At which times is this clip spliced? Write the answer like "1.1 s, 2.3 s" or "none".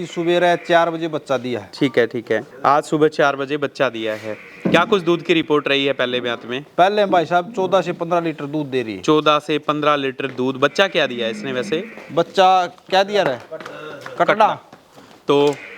2.5 s